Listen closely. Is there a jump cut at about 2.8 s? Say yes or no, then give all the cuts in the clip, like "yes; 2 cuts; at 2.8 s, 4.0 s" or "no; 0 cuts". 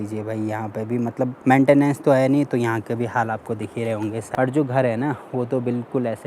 no; 2 cuts; at 1.4 s, 4.2 s